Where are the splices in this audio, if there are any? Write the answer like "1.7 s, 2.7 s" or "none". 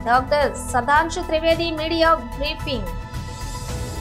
2.9 s